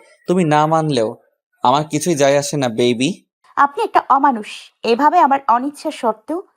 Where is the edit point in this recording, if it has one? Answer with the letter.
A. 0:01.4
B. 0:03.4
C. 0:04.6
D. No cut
B